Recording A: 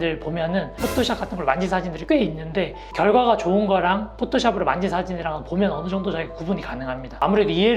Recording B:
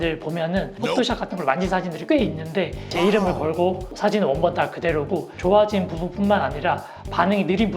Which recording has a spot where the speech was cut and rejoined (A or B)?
B